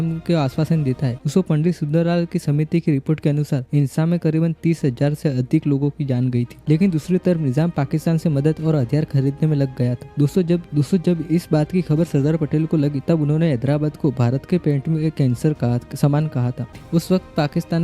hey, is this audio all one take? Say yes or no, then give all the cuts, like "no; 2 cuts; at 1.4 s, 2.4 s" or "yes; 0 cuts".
no; 3 cuts; at 1.2 s, 6.6 s, 16.7 s